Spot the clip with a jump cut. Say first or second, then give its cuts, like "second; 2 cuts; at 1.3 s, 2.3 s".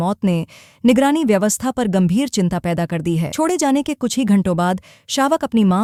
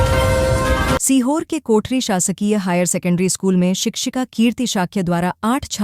second; 1 cut; at 1.0 s